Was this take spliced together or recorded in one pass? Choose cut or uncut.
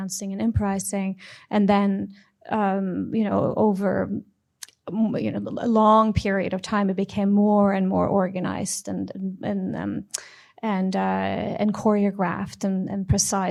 uncut